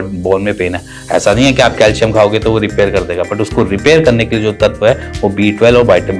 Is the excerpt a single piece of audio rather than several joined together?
yes; 0 cuts

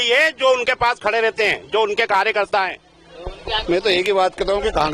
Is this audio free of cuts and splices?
no; 1 cut; at 3.6 s

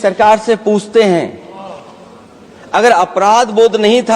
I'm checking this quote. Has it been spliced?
no; 0 cuts

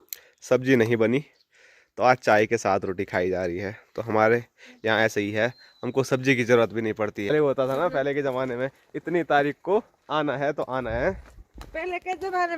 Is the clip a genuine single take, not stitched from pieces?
no; 1 cut; at 7.3 s

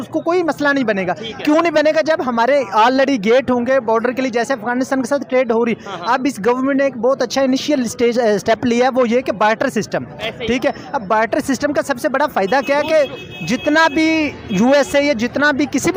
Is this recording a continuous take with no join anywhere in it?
yes; 0 cuts

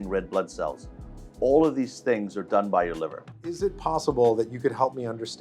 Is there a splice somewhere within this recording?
yes; 1 cut; at 3.6 s

